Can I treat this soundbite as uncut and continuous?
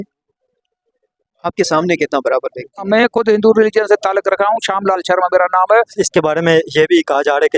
no; 2 cuts; at 2.8 s, 6.0 s

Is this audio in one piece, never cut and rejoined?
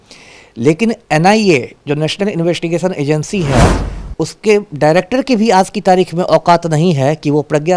yes; 0 cuts

